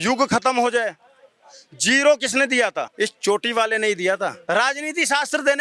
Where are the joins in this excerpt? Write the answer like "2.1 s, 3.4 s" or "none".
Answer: 2.9 s, 4.4 s

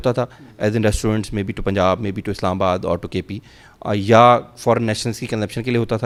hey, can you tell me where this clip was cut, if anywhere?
none

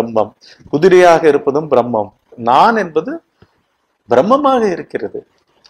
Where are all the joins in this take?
2.2 s

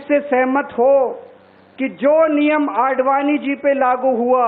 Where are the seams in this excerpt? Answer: none

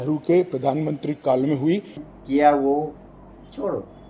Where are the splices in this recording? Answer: 2.0 s

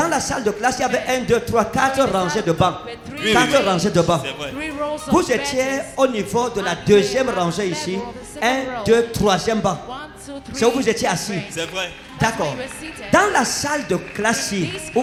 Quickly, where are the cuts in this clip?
none

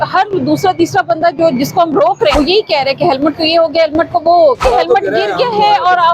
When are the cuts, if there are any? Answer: 2.3 s, 4.6 s

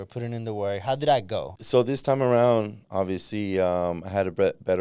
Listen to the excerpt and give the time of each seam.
1.5 s

